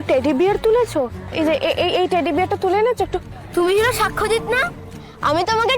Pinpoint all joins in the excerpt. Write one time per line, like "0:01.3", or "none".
0:01.3
0:03.4